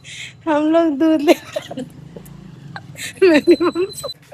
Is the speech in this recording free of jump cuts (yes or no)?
yes